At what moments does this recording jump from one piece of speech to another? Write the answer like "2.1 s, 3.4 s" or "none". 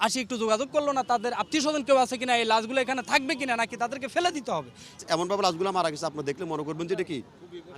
4.9 s